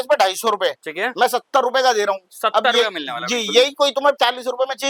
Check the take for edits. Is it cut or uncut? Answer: uncut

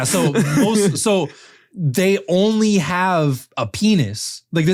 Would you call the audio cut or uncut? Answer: uncut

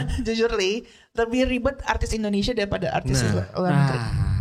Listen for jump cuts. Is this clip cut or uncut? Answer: uncut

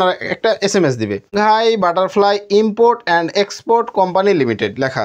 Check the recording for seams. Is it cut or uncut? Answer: cut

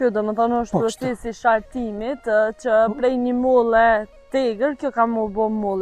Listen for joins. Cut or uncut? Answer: uncut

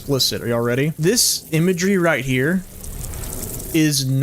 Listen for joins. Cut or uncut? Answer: cut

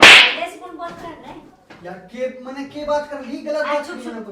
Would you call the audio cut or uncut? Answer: uncut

